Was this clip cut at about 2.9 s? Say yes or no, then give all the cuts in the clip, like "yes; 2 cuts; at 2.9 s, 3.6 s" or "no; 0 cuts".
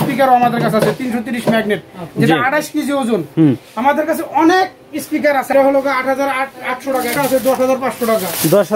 no; 2 cuts; at 5.5 s, 7.1 s